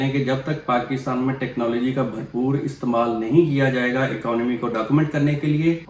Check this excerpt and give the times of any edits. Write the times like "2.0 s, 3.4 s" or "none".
none